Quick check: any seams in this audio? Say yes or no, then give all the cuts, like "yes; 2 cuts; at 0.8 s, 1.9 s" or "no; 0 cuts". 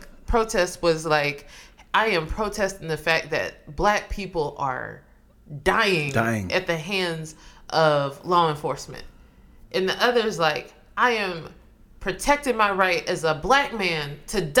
no; 0 cuts